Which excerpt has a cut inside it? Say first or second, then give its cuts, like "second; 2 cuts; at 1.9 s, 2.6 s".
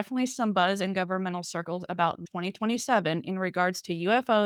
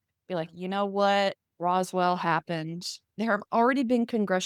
second; 1 cut; at 3.0 s